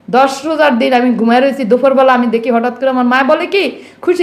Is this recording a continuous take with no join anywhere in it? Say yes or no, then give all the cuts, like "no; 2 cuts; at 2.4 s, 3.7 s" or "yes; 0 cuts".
yes; 0 cuts